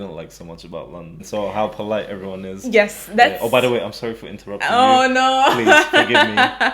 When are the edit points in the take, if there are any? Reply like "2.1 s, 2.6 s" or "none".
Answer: 1.1 s

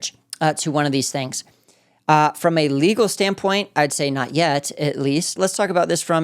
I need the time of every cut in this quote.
5.3 s

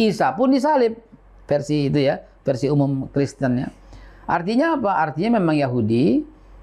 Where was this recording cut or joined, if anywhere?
none

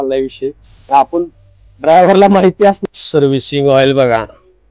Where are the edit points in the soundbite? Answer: 2.8 s

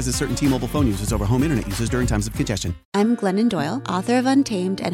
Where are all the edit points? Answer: 2.7 s

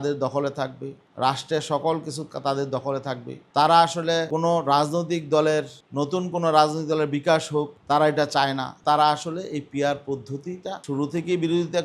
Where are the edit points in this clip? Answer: 8.8 s, 10.8 s

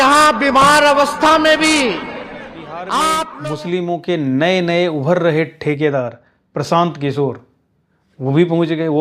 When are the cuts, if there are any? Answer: 3.3 s

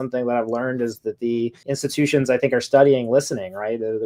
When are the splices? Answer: 1.6 s

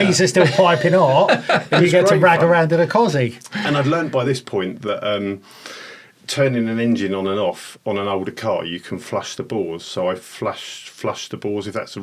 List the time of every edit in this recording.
none

